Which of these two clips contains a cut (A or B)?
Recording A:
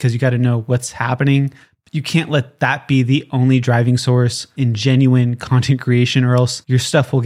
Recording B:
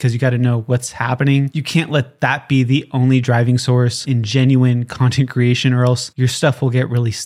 B